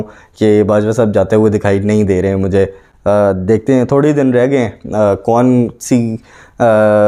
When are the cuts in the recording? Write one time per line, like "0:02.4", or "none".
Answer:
none